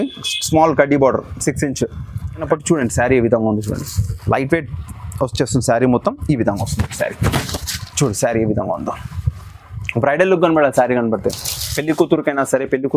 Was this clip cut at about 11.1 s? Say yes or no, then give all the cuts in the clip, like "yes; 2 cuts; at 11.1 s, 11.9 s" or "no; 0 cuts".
no; 1 cut; at 2.4 s